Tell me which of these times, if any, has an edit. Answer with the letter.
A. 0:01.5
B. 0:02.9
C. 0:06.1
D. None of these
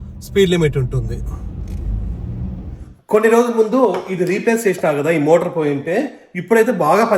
B